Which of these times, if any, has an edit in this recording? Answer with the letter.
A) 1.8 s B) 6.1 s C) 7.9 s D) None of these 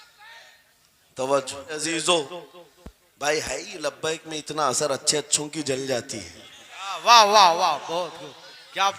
A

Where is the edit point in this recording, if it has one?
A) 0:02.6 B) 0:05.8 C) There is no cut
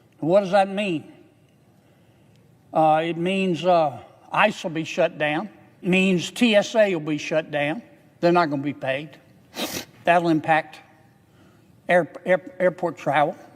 B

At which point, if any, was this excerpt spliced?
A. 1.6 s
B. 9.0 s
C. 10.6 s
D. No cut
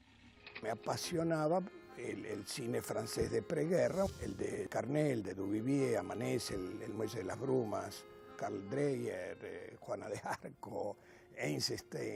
D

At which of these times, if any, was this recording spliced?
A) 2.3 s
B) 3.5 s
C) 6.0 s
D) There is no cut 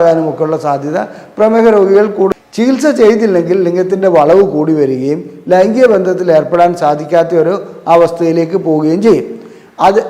A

